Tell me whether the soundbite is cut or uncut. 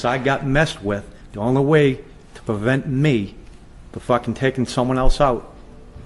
uncut